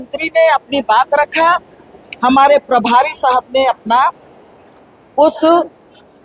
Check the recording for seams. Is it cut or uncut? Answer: uncut